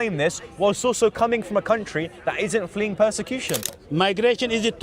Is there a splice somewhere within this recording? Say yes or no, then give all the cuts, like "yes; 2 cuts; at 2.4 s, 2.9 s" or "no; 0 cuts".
yes; 1 cut; at 3.7 s